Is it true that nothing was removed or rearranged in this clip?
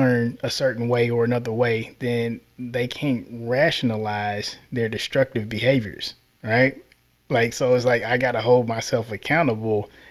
yes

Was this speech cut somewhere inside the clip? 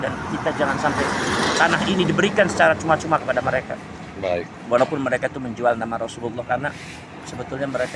no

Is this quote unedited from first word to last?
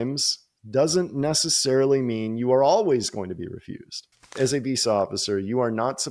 no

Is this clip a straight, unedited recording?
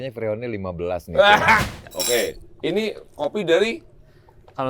no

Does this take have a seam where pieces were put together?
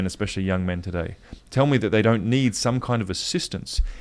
no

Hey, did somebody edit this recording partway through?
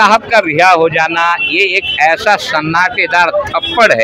no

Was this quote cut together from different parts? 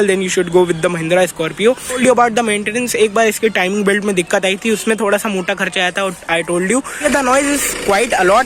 yes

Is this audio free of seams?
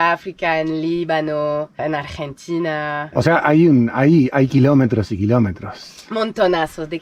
yes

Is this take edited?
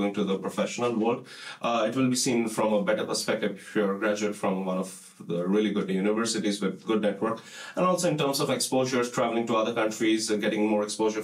no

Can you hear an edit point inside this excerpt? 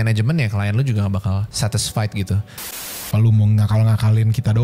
yes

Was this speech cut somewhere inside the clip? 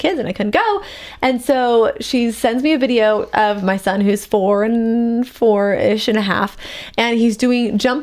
no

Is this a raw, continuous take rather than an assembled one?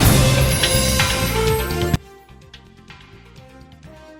yes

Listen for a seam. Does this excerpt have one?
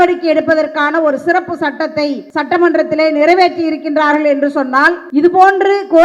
yes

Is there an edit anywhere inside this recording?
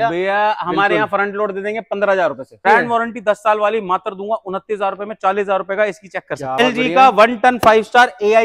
yes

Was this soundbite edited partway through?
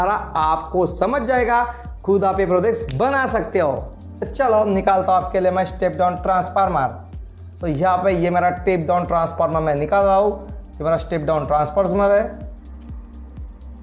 no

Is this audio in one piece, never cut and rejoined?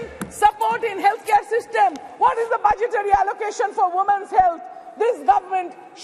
yes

